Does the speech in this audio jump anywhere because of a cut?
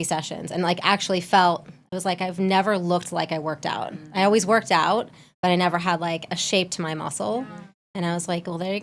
no; 0 cuts

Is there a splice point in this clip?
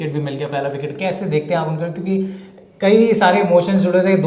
no; 0 cuts

